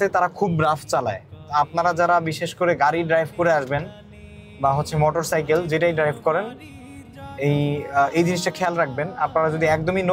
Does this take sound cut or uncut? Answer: uncut